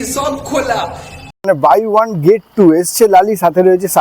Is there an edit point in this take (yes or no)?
yes